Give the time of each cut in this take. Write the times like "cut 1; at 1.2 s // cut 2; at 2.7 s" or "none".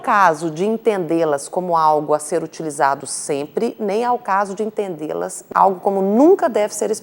cut 1; at 5.4 s

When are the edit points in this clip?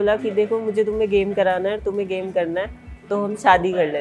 none

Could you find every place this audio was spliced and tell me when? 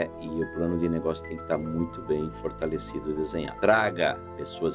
cut 1; at 3.5 s

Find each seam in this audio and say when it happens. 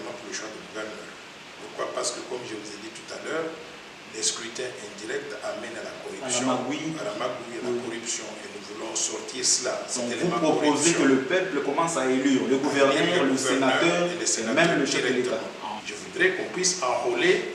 cut 1; at 15.8 s

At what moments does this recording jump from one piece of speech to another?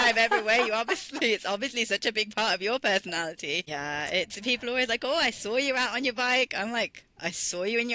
cut 1; at 3.7 s

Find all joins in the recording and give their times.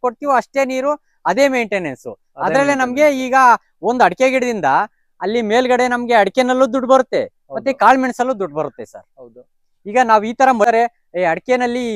cut 1; at 10.7 s

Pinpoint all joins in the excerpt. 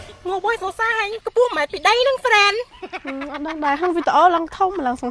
none

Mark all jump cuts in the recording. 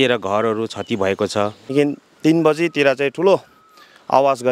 cut 1; at 1.7 s

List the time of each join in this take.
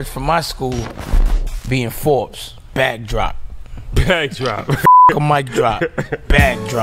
none

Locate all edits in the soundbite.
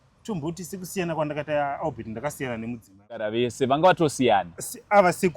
cut 1; at 3.3 s

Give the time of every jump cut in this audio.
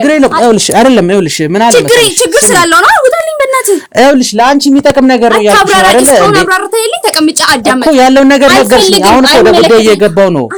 none

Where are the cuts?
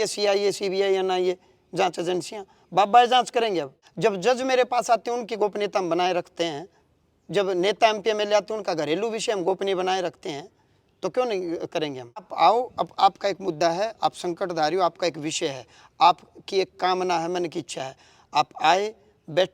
cut 1; at 3.8 s // cut 2; at 12.3 s

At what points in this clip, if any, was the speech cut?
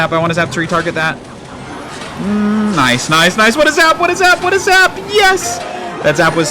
none

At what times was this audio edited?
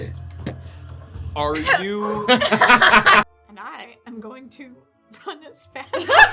cut 1; at 3.3 s

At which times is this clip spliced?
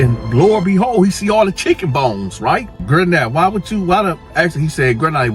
cut 1; at 2.8 s

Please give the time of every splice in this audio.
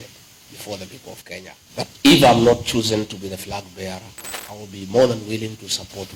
none

